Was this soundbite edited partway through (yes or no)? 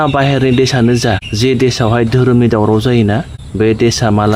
yes